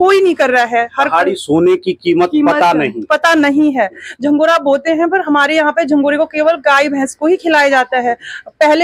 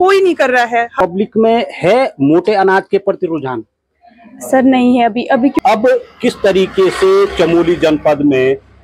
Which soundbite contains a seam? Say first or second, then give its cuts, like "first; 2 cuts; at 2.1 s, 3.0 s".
second; 2 cuts; at 0.9 s, 5.5 s